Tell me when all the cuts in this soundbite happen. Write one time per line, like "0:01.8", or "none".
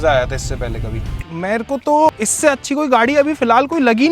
0:01.1
0:02.1